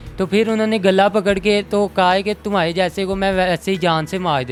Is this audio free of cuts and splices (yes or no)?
yes